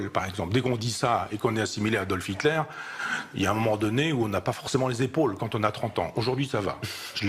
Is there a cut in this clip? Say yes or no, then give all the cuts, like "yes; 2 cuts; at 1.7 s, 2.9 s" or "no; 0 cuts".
no; 0 cuts